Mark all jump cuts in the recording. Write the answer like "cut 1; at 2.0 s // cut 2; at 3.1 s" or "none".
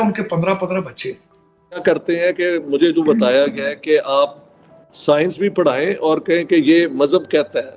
cut 1; at 1.8 s